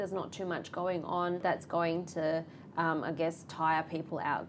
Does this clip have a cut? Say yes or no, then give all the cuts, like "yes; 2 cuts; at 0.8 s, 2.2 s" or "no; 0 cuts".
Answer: yes; 1 cut; at 1.4 s